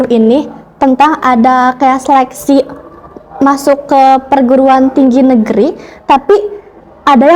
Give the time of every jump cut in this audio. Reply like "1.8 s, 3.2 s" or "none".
none